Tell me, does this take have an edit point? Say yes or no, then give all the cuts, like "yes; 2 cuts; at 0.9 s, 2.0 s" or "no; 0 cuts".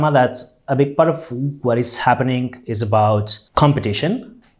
yes; 1 cut; at 3.4 s